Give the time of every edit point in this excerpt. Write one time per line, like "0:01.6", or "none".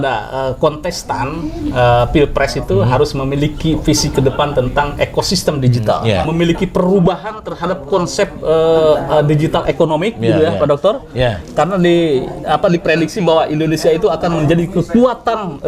0:06.3